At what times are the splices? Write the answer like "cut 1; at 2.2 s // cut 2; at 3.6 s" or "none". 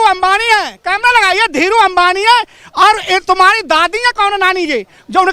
none